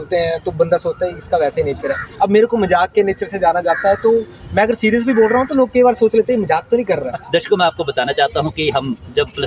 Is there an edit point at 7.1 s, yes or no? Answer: yes